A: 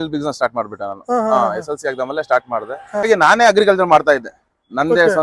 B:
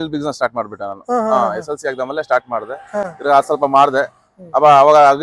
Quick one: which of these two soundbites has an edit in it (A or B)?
A